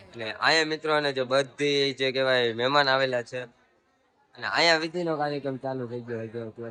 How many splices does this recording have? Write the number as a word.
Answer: zero